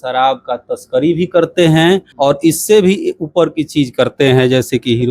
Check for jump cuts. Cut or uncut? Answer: cut